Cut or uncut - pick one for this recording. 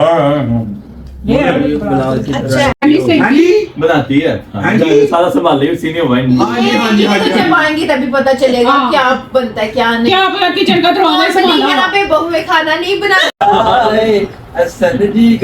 cut